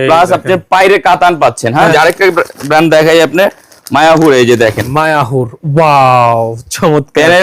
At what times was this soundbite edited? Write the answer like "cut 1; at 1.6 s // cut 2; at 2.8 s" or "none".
cut 1; at 1.9 s // cut 2; at 4.8 s